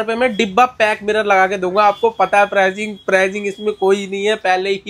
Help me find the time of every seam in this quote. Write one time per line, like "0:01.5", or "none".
none